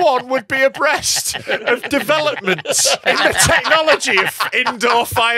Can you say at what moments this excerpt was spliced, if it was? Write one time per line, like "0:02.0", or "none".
0:03.0